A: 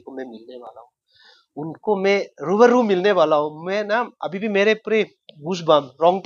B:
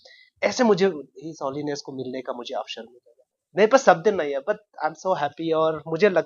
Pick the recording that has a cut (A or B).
B